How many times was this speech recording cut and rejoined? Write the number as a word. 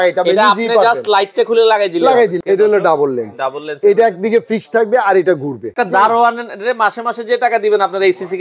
two